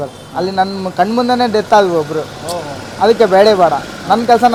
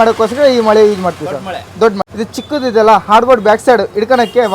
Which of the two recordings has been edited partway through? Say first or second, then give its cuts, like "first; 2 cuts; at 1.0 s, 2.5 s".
second; 1 cut; at 2.0 s